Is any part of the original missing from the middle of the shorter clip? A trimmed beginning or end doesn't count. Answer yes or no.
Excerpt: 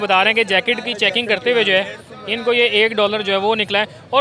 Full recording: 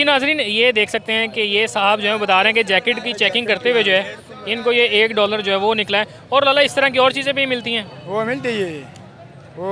no